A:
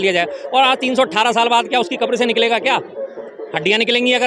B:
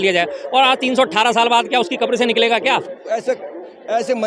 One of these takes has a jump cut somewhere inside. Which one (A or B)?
B